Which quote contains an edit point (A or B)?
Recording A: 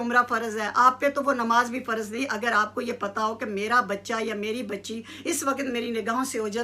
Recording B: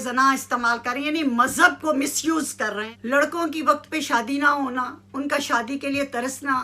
B